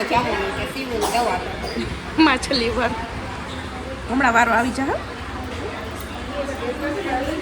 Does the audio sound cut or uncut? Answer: uncut